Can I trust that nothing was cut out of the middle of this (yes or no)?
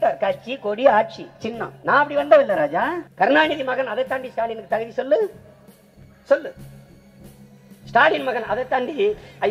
no